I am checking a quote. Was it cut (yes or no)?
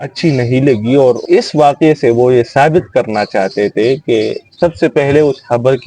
yes